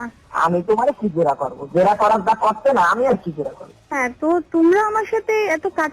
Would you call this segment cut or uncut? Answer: uncut